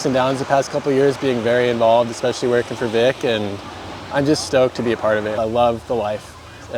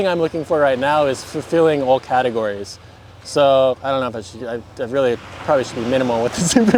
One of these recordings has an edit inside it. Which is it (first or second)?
first